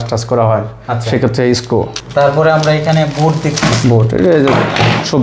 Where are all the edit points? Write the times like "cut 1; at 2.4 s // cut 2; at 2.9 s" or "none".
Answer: cut 1; at 2.0 s